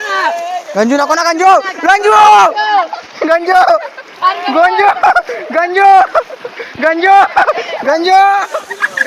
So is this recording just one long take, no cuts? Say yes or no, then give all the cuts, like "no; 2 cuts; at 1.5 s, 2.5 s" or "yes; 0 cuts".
yes; 0 cuts